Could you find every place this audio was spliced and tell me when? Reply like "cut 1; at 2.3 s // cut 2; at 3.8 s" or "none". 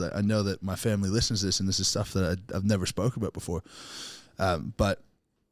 none